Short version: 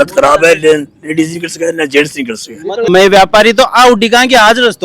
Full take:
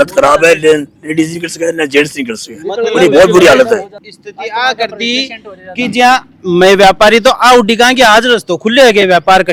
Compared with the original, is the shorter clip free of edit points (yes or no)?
no